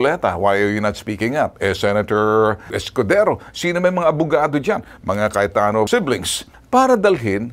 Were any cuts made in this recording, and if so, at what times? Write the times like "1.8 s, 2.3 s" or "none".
2.7 s